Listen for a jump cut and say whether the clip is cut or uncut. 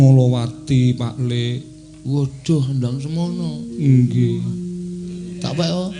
uncut